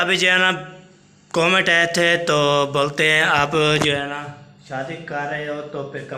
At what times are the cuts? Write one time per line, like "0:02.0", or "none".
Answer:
none

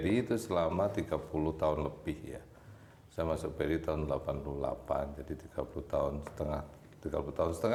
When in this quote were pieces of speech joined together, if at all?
none

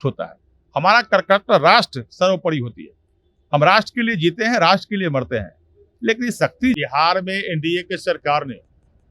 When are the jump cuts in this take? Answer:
0:06.8

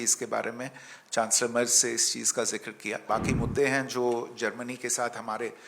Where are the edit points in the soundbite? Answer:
0:03.0

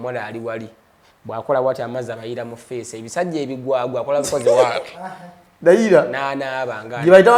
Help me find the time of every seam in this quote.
none

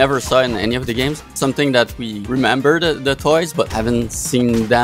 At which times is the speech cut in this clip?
0:01.3
0:02.1
0:03.7

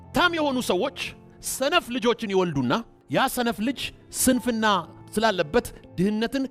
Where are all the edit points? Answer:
0:03.0
0:05.0

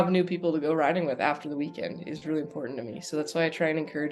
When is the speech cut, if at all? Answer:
none

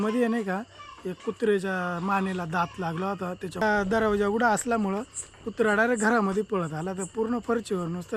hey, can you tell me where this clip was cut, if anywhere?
none

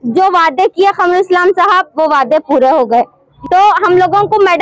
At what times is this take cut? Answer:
0:03.3

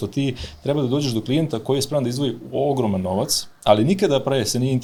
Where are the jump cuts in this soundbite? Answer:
none

